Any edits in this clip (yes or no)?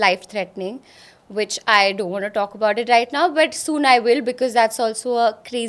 no